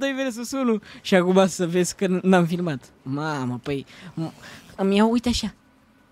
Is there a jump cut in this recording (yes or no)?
no